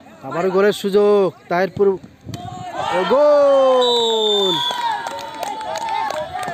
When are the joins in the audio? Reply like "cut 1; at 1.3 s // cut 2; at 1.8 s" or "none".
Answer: cut 1; at 5.3 s